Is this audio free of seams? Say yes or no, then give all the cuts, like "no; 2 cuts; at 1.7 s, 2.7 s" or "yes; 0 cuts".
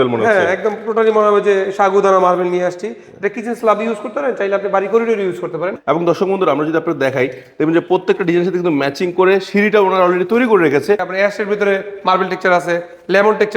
no; 2 cuts; at 5.7 s, 11.1 s